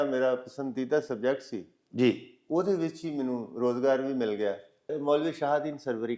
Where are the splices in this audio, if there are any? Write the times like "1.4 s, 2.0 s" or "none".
4.9 s